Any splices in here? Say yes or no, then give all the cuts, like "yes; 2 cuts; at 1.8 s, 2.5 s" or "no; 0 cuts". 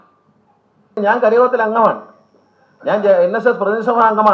yes; 1 cut; at 1.0 s